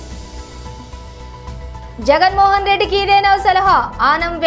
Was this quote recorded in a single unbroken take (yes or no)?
yes